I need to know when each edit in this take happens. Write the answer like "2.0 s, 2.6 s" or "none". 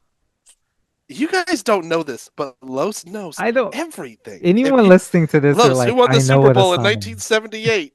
none